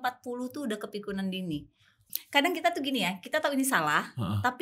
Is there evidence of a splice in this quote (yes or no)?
yes